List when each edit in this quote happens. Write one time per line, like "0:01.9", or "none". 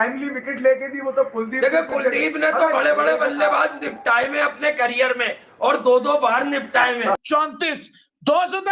0:07.2